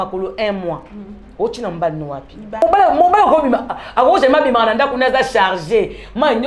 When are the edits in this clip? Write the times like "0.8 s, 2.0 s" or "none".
2.6 s